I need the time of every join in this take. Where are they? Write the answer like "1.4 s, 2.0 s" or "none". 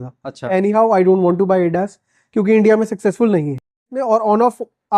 3.9 s